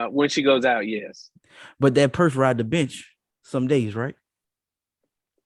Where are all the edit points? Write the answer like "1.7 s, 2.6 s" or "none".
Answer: none